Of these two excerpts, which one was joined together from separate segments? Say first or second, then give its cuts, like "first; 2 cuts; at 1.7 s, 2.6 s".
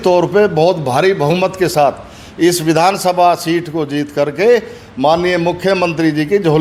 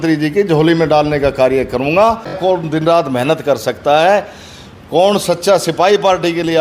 second; 1 cut; at 2.4 s